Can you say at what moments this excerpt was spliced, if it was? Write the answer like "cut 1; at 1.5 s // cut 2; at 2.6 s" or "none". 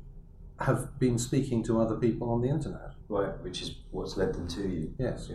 cut 1; at 2.9 s